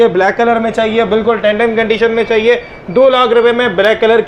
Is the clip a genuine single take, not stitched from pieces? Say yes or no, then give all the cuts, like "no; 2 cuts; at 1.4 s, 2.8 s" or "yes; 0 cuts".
yes; 0 cuts